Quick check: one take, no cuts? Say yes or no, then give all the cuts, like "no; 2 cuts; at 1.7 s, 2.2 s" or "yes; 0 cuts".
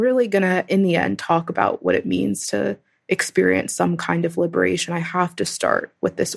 yes; 0 cuts